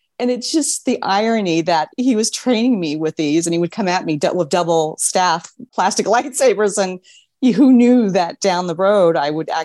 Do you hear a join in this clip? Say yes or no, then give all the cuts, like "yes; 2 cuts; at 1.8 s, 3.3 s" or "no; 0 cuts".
no; 0 cuts